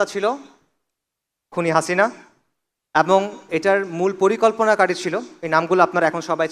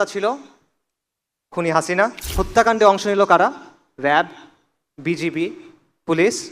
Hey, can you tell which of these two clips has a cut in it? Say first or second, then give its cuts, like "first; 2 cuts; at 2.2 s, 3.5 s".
second; 1 cut; at 2.3 s